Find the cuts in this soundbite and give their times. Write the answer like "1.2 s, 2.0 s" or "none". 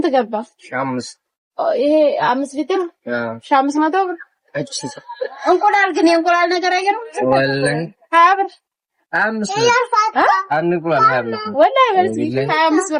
none